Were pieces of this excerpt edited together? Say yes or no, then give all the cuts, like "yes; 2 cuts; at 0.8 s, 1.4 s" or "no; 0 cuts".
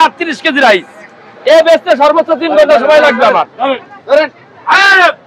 no; 0 cuts